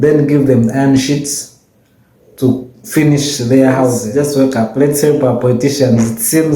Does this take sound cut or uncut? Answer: cut